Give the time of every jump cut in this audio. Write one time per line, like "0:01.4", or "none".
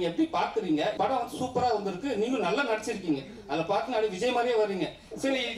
0:00.9